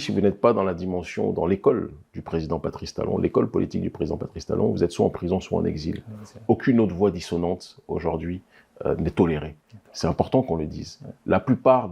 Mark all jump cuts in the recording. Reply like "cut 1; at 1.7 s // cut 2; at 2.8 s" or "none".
none